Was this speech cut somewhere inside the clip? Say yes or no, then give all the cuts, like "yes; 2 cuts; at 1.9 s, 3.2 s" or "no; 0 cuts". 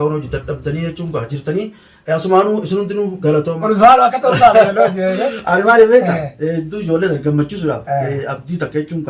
yes; 1 cut; at 3.6 s